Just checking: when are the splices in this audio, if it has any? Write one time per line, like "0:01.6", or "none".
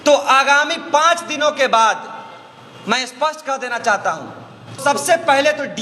0:04.8